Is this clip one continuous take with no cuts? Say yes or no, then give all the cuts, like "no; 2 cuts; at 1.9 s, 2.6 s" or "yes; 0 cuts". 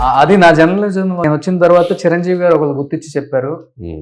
no; 1 cut; at 1.2 s